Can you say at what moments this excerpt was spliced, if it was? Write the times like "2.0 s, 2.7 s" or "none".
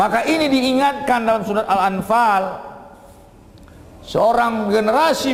none